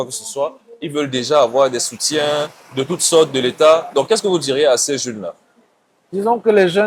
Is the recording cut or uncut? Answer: uncut